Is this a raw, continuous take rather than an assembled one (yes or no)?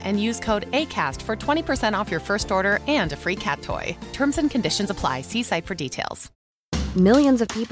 no